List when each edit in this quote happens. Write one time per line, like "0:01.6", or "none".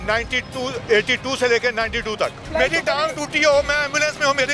0:02.4

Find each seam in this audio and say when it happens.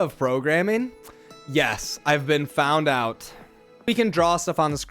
0:03.9

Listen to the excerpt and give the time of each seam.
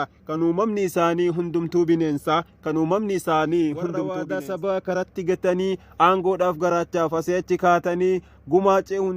0:04.1

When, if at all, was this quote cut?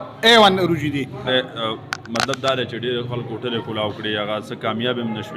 0:01.3

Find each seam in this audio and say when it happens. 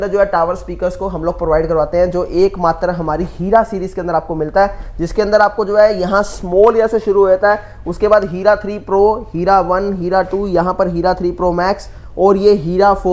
none

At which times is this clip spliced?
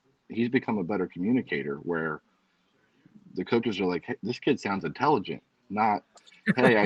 none

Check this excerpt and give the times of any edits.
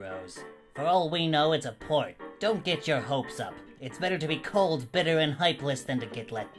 none

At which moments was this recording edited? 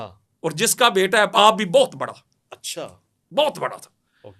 none

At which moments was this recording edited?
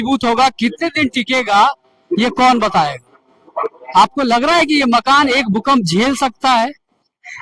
none

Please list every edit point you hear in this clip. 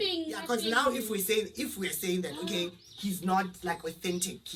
none

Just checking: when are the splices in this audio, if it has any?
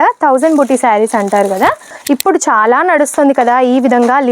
0:01.9

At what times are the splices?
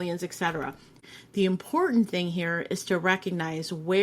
0:01.1

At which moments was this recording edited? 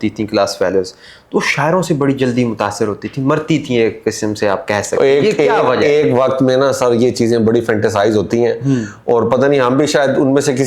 none

